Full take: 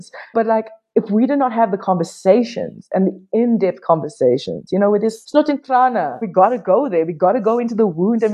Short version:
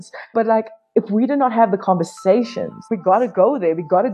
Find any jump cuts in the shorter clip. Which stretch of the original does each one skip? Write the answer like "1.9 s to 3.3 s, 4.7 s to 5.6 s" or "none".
2.8 s to 6.1 s